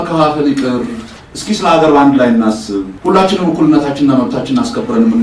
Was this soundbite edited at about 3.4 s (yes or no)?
no